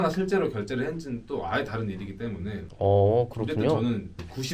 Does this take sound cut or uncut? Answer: uncut